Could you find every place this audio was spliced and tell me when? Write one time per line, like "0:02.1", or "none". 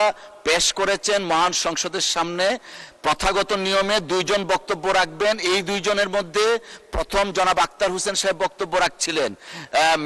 none